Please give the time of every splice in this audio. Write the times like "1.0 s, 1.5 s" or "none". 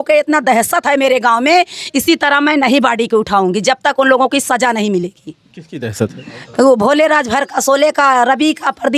none